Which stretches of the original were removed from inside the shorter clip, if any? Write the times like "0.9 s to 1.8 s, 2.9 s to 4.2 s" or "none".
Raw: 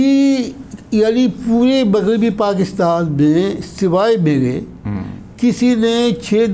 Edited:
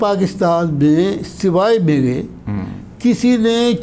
none